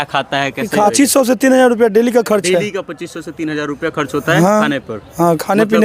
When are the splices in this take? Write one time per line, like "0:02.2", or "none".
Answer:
0:00.9